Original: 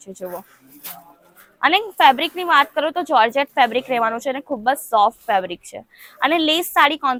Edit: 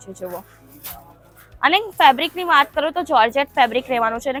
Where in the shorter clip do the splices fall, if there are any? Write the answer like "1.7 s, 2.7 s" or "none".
none

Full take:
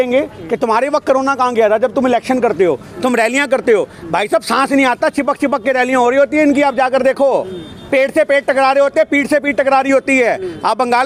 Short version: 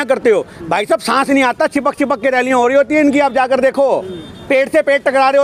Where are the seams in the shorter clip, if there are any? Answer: none

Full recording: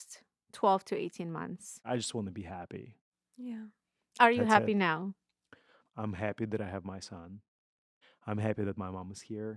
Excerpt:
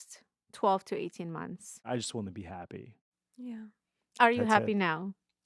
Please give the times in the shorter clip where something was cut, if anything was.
none

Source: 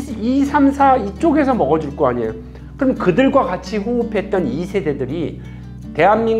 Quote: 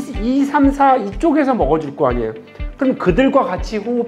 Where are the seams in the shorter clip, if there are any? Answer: none

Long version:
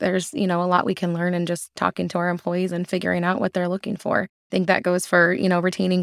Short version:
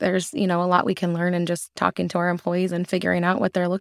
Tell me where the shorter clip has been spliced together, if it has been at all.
none

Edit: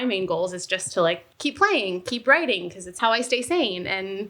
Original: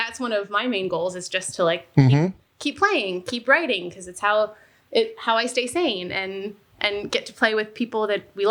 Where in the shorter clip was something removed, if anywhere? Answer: 1.2 s, 2.9 s

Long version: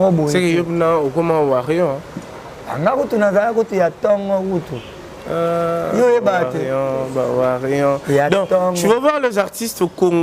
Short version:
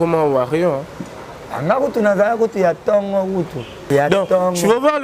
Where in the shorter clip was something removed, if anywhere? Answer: 3.8 s

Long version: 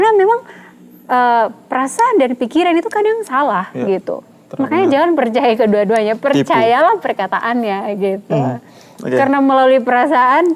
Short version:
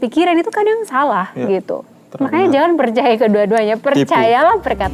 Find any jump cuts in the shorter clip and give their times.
none

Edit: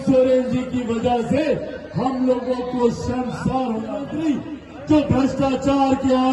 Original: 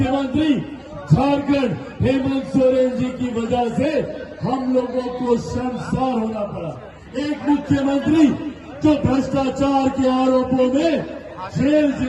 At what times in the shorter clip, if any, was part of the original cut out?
4.1 s

